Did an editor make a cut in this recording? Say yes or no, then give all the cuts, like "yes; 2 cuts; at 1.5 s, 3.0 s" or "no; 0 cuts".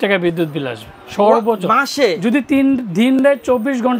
no; 0 cuts